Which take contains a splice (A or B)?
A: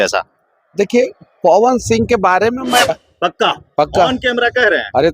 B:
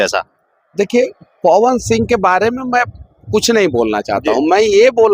A